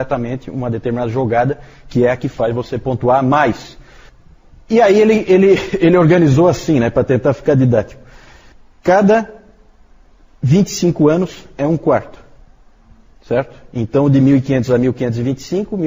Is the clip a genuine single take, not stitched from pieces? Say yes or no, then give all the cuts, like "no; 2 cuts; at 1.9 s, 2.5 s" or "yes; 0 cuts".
no; 1 cut; at 2.0 s